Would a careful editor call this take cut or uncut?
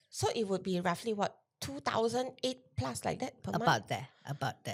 uncut